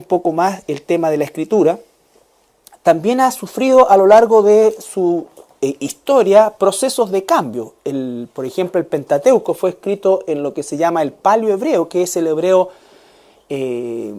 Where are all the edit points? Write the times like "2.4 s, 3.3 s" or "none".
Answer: none